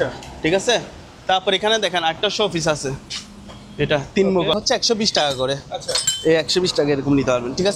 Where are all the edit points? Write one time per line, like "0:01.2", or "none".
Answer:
0:04.5